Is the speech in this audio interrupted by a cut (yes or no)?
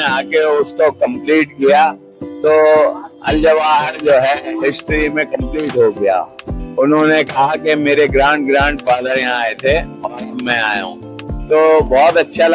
no